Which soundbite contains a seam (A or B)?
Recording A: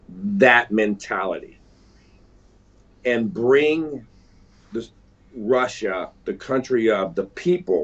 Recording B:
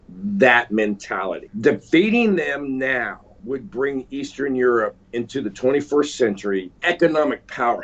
B